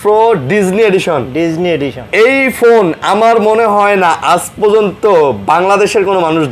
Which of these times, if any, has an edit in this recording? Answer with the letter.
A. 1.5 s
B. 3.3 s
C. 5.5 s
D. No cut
D